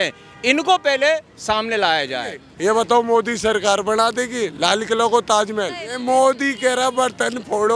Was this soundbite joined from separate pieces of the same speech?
yes; 2 cuts; at 2.5 s, 5.6 s

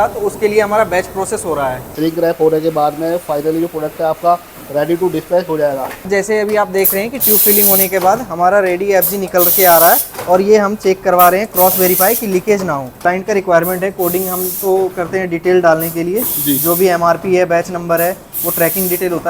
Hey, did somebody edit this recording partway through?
yes; 3 cuts; at 1.8 s, 6.1 s, 13.0 s

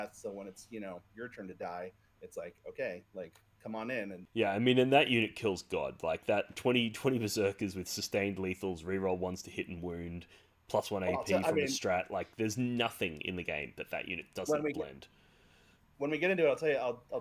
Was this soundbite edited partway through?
yes; 1 cut; at 4.2 s

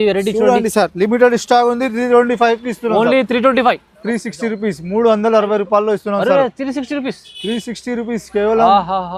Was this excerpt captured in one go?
no; 1 cut; at 3.9 s

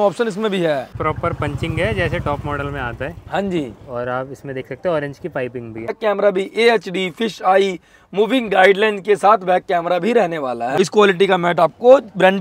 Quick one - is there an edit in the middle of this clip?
yes; 3 cuts; at 0.9 s, 6.0 s, 10.8 s

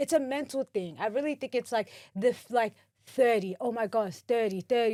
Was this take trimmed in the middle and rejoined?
no; 0 cuts

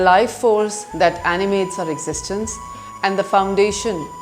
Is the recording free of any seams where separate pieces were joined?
yes; 0 cuts

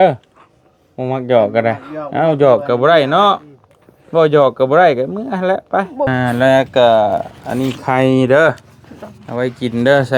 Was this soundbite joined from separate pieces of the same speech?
yes; 1 cut; at 6.1 s

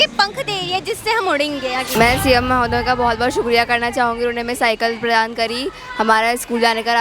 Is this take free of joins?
no; 1 cut; at 1.9 s

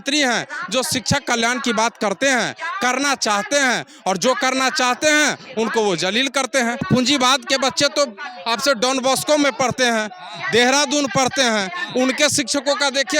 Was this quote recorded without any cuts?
no; 1 cut; at 6.9 s

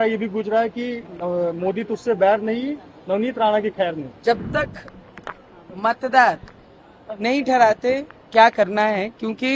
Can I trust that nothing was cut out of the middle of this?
no; 1 cut; at 4.1 s

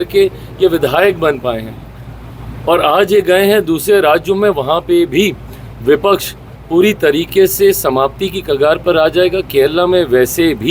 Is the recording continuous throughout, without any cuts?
yes; 0 cuts

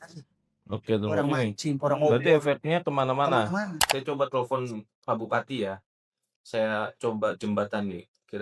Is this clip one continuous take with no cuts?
no; 1 cut; at 3.9 s

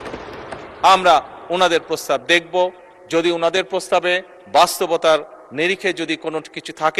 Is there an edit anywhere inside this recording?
no; 0 cuts

